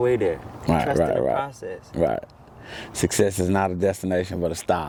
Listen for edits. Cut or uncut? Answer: uncut